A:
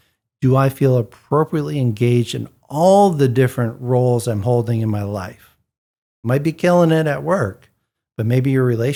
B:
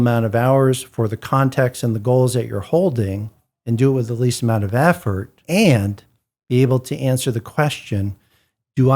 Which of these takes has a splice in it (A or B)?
B